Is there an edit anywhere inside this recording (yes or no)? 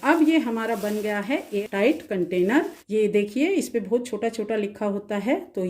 yes